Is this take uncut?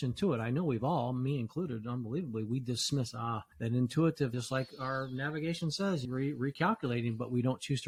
yes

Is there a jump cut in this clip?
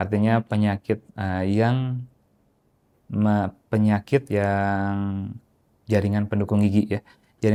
no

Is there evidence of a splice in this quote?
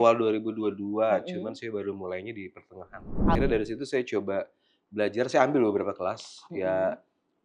yes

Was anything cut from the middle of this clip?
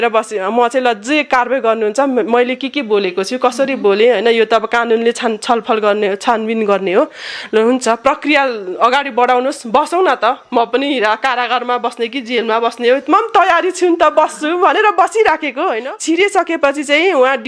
yes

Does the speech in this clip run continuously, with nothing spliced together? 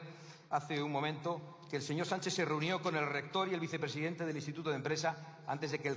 yes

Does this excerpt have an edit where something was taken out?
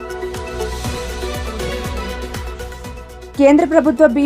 yes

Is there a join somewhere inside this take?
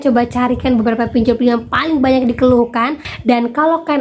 yes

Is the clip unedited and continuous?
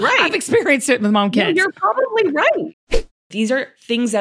no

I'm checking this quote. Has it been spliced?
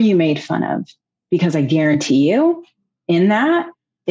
no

